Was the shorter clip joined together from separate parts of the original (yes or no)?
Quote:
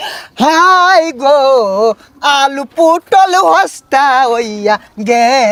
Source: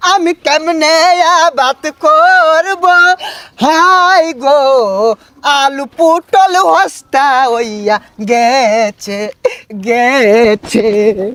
no